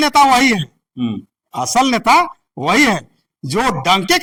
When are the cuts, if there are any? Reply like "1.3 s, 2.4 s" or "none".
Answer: none